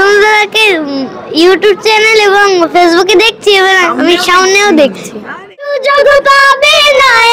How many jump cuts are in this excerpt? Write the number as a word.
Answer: one